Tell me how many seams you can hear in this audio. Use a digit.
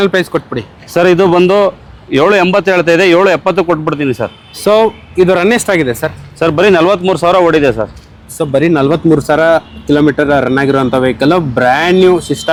0